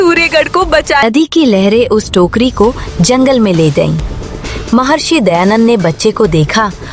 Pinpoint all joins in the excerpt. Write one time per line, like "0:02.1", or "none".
0:01.0

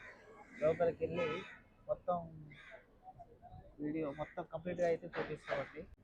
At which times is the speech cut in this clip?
none

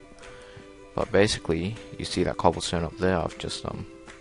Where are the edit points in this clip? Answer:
0:03.2

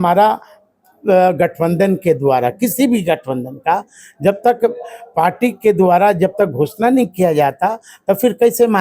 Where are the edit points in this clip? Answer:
none

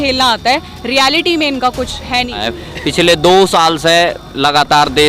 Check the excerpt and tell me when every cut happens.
0:02.4

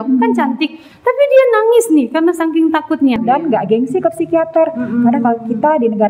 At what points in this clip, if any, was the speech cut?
0:03.2

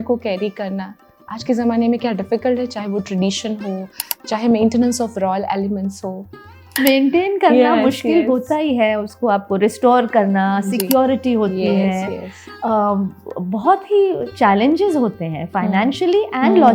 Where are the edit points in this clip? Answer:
0:06.6

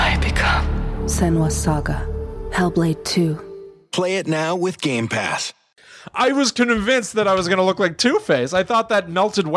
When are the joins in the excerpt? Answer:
0:05.8

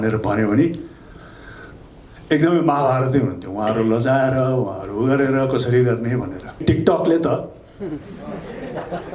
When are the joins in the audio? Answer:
0:06.6

